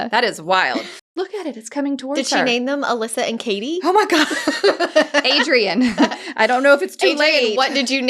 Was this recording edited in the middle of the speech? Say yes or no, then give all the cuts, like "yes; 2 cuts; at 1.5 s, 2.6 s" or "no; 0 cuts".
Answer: yes; 1 cut; at 1.1 s